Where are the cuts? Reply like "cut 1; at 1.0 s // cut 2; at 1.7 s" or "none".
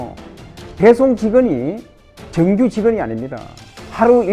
none